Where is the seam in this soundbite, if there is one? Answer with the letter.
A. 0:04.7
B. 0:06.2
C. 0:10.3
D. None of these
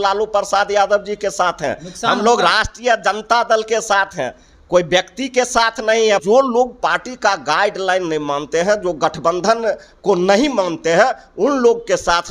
B